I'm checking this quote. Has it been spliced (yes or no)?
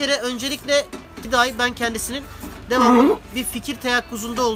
yes